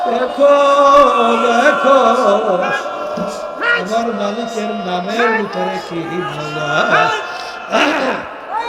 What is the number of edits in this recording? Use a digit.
0